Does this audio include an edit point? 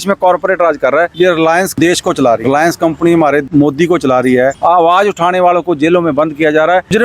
yes; 2 cuts; at 1.1 s, 4.6 s

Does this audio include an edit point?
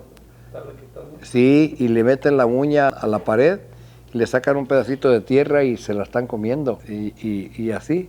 no; 0 cuts

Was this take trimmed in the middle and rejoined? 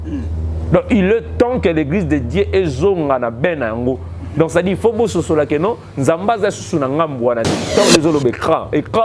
yes; 1 cut; at 7.6 s

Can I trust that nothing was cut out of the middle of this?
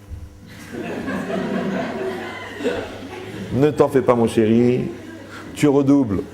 yes; 0 cuts

